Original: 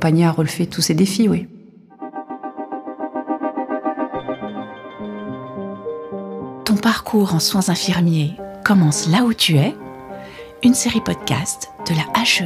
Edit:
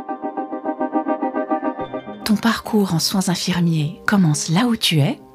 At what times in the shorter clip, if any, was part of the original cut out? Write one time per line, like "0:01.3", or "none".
0:02.1
0:03.9